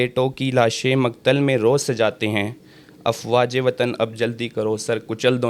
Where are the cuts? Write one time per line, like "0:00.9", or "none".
none